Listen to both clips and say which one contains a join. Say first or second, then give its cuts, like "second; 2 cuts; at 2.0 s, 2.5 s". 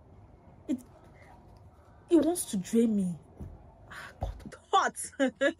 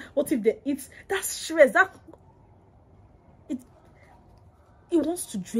first; 1 cut; at 4.6 s